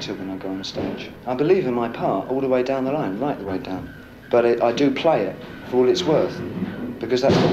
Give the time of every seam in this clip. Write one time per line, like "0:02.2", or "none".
0:01.1